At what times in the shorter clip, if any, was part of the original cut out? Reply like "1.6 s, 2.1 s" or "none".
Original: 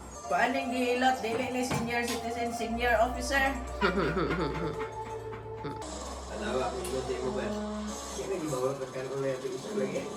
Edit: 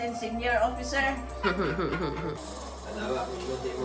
2.4 s